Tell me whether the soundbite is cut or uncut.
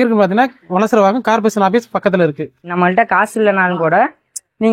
cut